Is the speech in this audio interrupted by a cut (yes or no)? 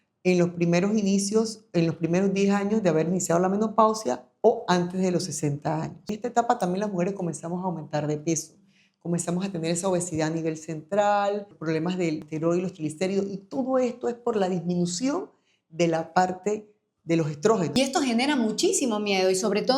yes